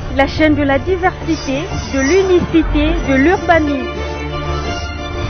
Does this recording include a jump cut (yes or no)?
no